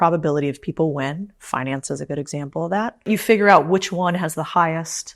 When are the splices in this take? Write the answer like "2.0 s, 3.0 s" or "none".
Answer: 3.1 s